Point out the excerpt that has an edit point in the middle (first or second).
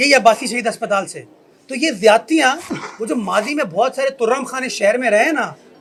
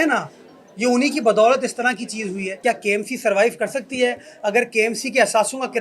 second